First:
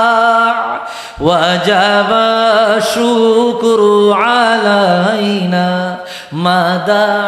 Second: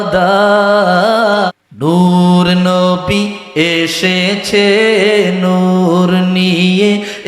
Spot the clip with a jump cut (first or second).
second